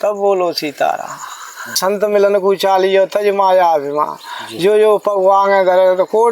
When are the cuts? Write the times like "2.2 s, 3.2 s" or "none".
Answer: 1.8 s